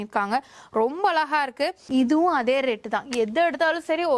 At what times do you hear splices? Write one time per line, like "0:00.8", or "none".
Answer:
0:01.9